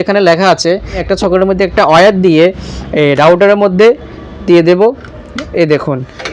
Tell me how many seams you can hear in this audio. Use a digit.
1